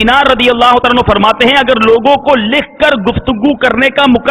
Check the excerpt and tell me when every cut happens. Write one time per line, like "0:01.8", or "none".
none